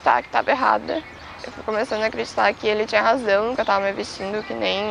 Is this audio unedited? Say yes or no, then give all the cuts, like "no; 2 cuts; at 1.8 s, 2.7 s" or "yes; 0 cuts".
yes; 0 cuts